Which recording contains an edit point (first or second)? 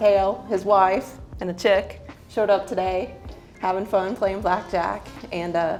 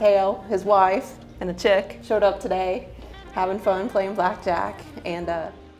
second